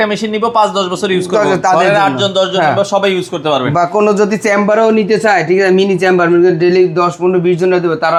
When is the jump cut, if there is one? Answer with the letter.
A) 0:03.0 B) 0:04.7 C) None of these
C